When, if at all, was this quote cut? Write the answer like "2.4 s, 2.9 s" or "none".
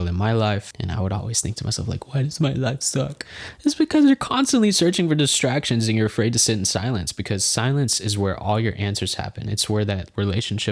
none